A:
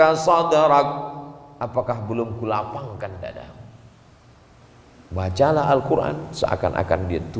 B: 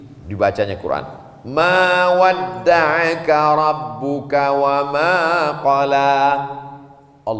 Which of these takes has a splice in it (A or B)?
A